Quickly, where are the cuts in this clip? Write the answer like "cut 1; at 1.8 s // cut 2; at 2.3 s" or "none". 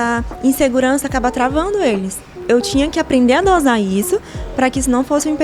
cut 1; at 2.4 s